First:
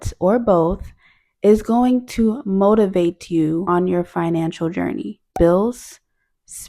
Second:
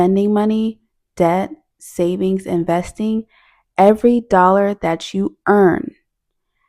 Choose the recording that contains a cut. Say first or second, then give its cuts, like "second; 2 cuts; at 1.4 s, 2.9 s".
first; 2 cuts; at 3.7 s, 5.3 s